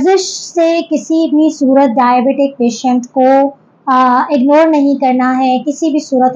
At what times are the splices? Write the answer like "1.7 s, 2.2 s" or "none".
none